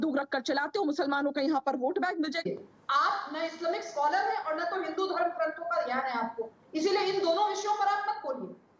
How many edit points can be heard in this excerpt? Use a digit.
1